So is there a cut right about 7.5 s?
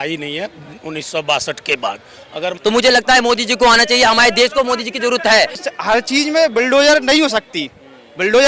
no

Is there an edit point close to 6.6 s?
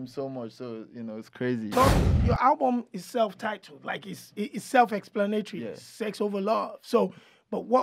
no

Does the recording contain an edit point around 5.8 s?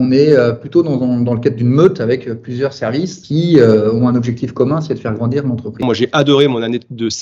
yes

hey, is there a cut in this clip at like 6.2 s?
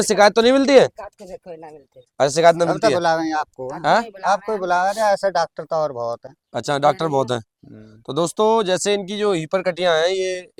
no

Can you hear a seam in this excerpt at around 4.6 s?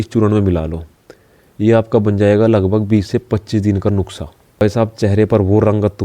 yes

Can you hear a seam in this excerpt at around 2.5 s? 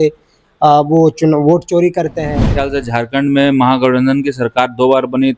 yes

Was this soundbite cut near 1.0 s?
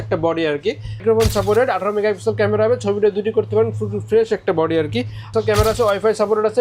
yes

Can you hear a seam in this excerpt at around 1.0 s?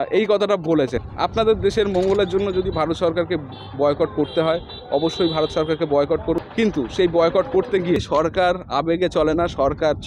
yes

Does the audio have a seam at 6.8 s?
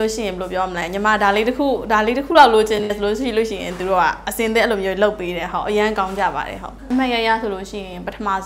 yes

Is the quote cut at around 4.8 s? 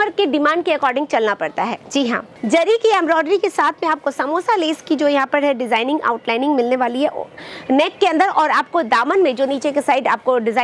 no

